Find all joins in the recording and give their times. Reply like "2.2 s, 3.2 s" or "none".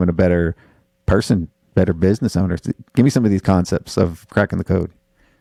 none